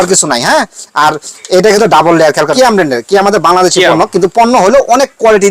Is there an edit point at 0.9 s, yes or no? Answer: no